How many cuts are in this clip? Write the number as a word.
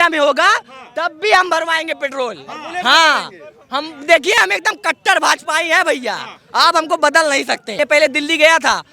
one